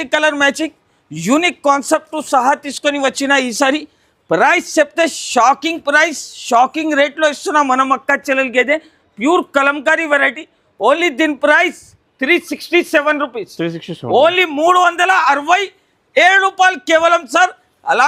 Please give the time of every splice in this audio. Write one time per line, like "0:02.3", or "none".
none